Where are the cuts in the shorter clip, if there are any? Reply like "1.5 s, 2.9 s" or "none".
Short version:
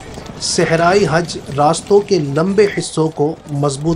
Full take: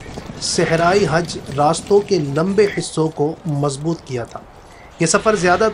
none